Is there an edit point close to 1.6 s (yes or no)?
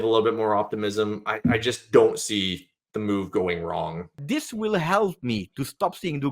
no